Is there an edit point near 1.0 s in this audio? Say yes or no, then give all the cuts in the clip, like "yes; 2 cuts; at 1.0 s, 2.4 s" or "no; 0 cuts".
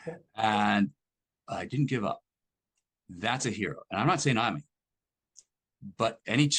no; 0 cuts